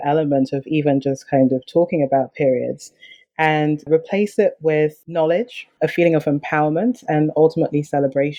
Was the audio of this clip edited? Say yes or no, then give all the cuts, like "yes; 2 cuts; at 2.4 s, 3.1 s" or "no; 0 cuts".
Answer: no; 0 cuts